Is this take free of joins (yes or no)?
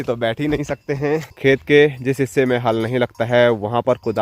no